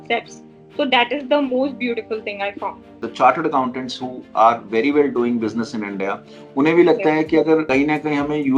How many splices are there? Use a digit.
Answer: 2